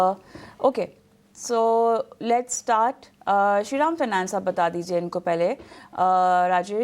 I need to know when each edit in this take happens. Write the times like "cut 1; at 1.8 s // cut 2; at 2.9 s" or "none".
cut 1; at 3.4 s